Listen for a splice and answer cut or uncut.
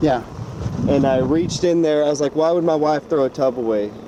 uncut